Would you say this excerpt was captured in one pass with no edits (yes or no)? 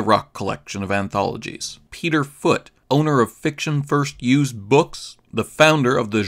no